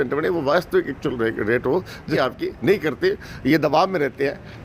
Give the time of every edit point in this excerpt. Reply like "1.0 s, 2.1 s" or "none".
2.0 s